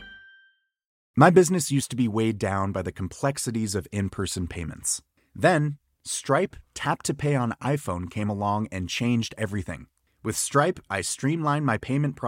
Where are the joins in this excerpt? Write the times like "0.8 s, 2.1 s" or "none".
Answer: 1.1 s